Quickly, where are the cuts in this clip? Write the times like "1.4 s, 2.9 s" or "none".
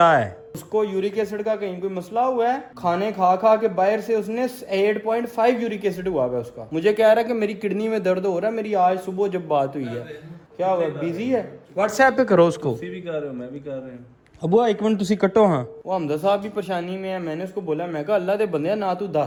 none